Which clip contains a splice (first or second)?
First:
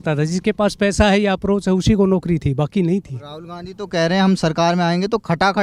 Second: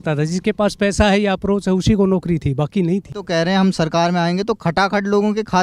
second